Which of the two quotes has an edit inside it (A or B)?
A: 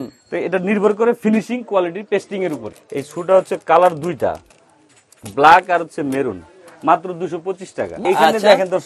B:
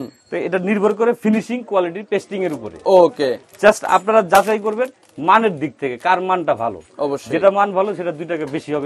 A